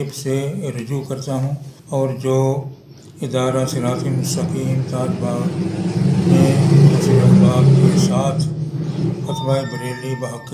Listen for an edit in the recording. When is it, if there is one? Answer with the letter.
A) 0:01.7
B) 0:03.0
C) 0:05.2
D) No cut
A